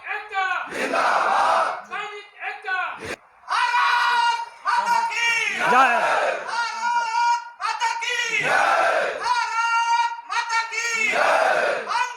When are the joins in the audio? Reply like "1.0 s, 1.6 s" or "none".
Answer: 3.1 s